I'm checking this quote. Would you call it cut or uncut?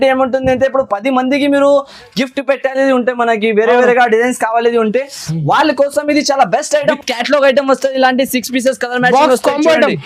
cut